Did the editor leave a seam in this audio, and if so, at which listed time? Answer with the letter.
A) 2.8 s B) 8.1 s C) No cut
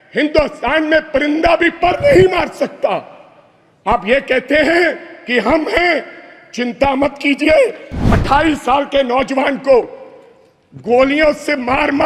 B